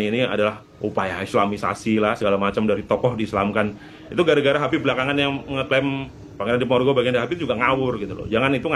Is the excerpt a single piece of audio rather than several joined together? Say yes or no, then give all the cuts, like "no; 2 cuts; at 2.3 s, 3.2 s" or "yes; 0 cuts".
yes; 0 cuts